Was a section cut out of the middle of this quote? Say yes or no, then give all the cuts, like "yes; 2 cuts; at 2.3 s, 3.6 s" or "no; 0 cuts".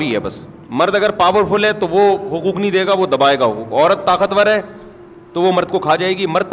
no; 0 cuts